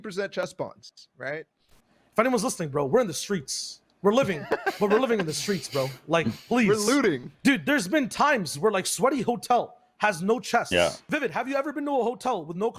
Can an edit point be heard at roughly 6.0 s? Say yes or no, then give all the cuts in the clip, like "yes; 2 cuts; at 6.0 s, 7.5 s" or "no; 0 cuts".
no; 3 cuts; at 1.8 s, 7.3 s, 11.0 s